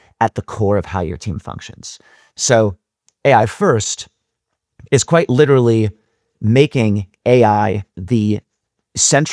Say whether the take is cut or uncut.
uncut